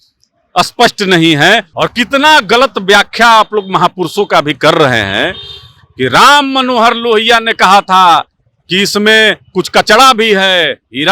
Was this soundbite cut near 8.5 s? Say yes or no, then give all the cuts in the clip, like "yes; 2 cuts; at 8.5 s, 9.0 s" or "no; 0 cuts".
no; 1 cut; at 1.7 s